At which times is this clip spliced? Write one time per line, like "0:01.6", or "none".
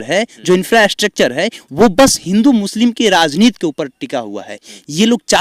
none